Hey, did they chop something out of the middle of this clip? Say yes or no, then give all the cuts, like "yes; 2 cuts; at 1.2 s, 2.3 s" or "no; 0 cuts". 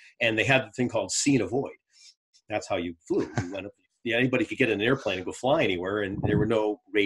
no; 0 cuts